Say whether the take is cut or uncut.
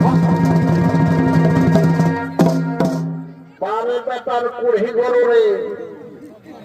uncut